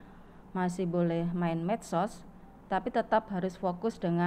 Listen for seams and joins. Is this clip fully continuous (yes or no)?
yes